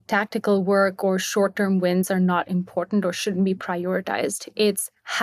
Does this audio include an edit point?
no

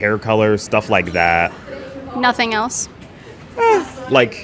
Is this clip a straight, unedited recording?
yes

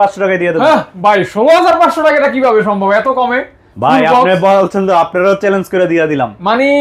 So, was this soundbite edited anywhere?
no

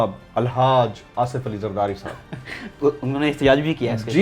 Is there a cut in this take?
no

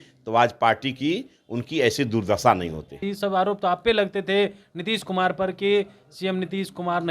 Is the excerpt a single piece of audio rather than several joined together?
no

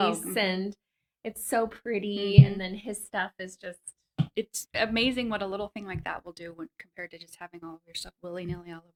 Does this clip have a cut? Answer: no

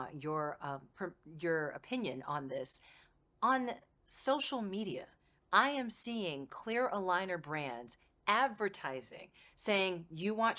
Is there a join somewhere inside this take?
no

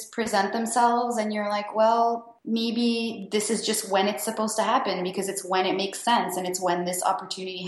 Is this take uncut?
no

